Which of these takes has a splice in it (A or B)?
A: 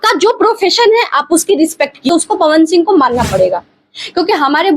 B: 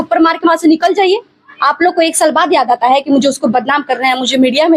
A